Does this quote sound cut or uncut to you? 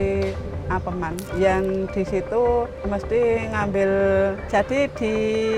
cut